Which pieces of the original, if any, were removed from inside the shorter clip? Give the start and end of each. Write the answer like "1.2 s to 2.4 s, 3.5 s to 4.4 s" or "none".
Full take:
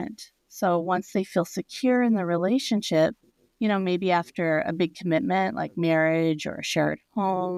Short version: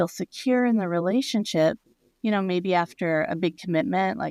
none